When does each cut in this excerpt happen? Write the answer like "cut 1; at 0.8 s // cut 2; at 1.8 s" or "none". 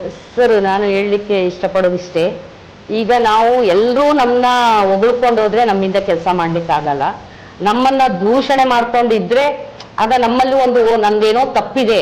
none